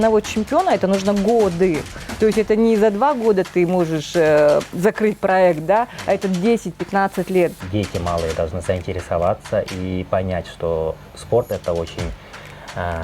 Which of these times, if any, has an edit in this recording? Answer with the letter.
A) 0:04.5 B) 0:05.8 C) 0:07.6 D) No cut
C